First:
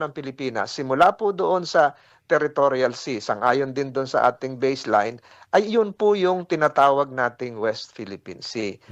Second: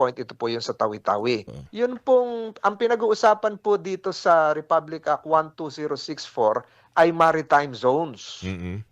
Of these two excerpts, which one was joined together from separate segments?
second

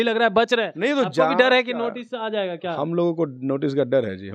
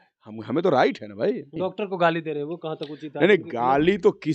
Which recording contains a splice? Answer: second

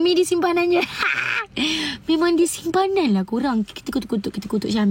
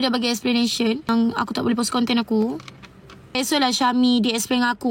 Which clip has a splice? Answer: second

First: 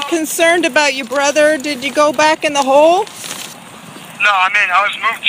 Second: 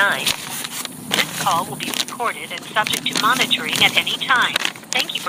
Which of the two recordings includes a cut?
first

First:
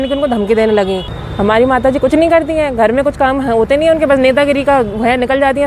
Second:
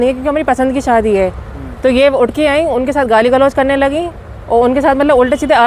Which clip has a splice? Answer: first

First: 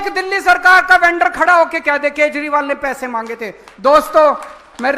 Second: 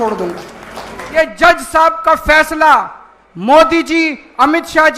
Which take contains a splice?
second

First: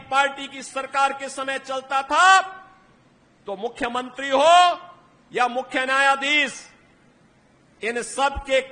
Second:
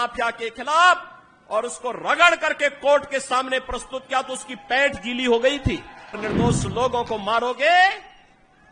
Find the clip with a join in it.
second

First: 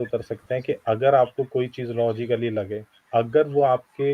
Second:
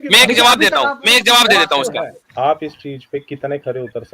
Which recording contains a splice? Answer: second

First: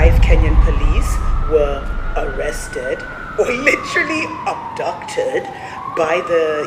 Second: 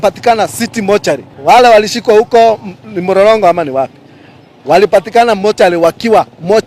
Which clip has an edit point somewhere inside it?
second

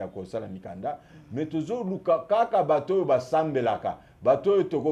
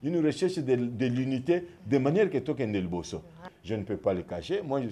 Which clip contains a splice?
second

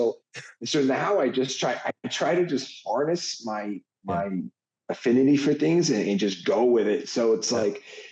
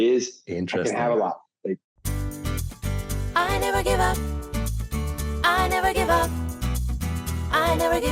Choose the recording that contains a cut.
second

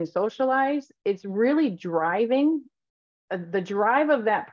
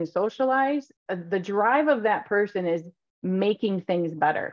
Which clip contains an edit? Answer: second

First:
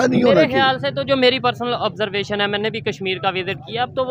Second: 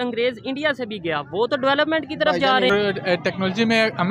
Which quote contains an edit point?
second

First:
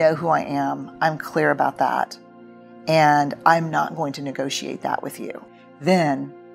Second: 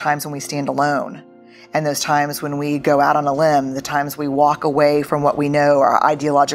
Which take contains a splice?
first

